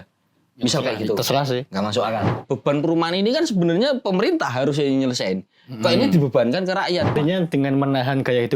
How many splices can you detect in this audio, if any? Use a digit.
2